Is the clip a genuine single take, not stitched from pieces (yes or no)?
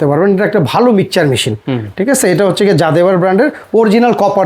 yes